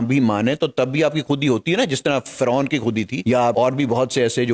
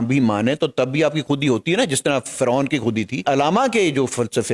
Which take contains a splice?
second; 1 cut; at 3.2 s

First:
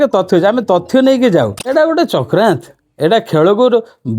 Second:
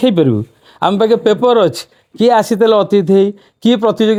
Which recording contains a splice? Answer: first; 1 cut; at 1.7 s

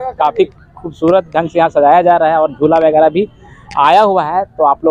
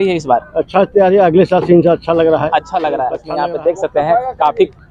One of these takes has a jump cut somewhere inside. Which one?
second; 1 cut; at 3.2 s

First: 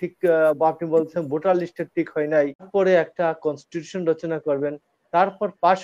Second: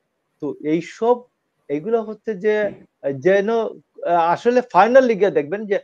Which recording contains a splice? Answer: first; 1 cut; at 2.7 s

